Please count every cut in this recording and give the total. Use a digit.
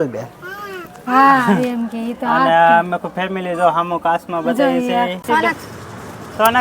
1